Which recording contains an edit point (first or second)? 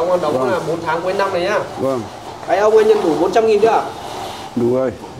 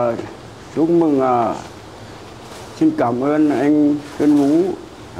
first